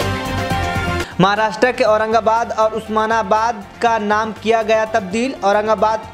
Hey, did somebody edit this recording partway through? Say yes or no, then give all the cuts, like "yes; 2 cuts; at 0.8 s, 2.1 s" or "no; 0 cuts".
no; 0 cuts